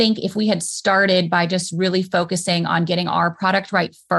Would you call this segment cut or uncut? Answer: uncut